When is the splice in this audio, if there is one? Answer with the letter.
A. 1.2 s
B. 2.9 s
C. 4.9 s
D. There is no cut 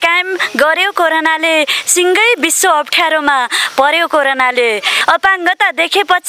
C